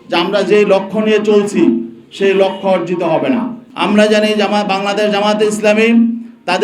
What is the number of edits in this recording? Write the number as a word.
one